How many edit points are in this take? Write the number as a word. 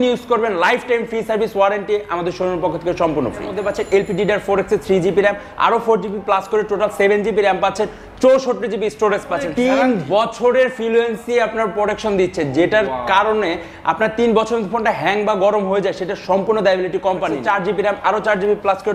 three